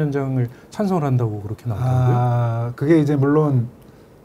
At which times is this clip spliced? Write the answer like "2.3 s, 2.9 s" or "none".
none